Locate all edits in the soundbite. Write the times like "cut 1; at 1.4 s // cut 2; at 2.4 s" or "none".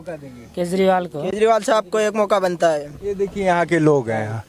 none